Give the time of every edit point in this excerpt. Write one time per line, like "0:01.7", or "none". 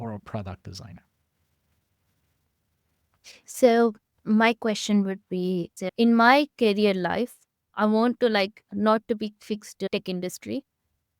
none